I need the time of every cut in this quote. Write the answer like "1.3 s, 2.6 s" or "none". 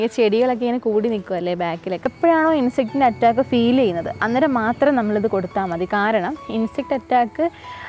2.1 s